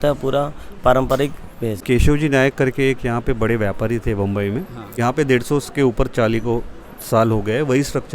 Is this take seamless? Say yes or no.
no